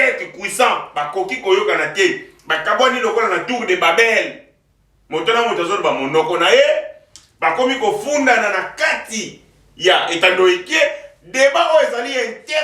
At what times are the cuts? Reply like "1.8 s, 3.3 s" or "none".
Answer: none